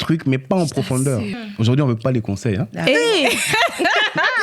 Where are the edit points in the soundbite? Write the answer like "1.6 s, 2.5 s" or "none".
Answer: 1.4 s